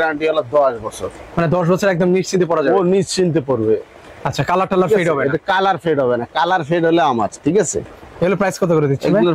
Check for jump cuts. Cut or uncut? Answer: uncut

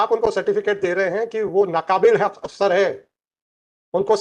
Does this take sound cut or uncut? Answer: uncut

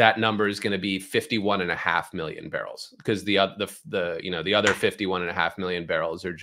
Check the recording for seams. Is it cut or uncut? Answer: uncut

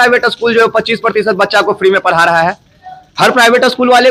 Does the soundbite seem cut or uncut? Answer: uncut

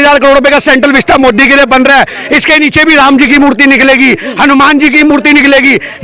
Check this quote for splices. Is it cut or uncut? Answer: uncut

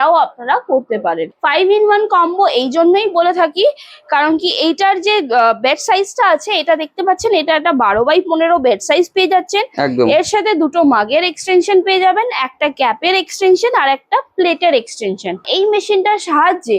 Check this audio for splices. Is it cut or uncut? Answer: cut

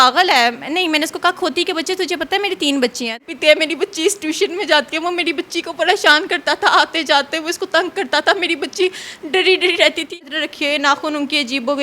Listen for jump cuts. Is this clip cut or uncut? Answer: cut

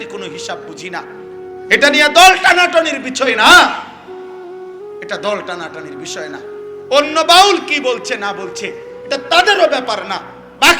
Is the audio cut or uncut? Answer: cut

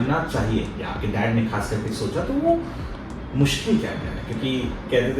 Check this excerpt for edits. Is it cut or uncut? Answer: uncut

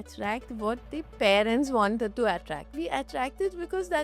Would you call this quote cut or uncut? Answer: cut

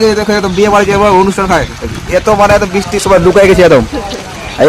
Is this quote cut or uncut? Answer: uncut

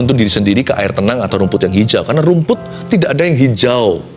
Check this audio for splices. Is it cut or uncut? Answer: cut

